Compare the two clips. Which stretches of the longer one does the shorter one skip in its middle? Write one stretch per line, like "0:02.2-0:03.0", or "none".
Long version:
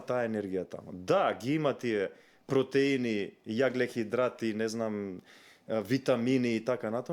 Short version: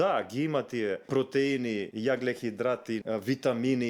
0:02.1-0:02.4
0:03.3-0:03.4
0:04.5-0:05.6

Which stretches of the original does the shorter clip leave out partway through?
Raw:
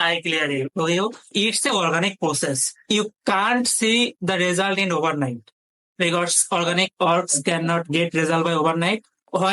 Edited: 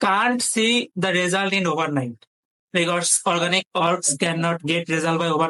none

